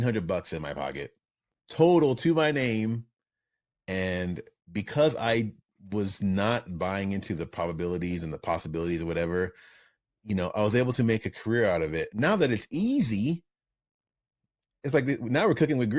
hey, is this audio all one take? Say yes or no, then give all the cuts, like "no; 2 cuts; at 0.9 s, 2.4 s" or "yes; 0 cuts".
no; 1 cut; at 12.1 s